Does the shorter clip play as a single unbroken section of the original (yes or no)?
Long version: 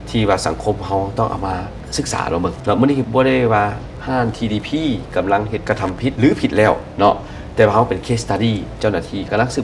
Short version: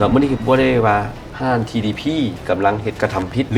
yes